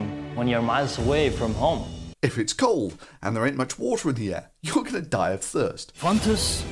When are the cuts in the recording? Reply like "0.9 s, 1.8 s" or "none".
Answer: none